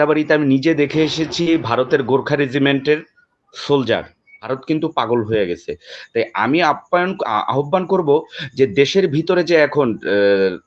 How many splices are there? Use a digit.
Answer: 1